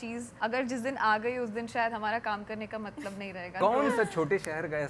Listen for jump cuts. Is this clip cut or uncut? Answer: cut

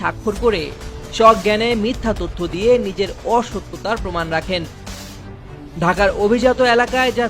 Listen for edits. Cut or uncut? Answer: cut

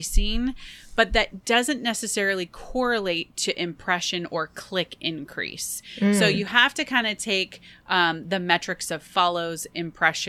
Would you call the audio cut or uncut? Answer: uncut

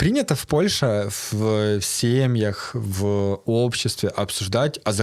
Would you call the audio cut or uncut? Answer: uncut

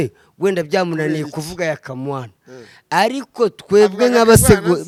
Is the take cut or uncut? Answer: uncut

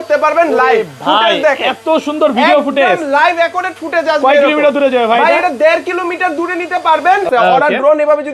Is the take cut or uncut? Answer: cut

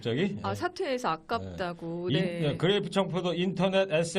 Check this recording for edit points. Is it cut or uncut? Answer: uncut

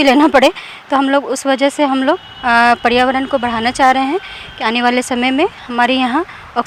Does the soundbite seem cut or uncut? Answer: uncut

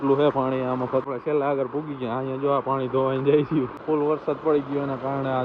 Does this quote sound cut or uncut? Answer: cut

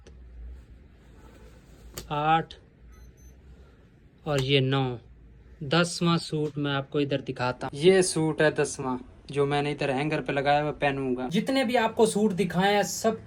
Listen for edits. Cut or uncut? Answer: uncut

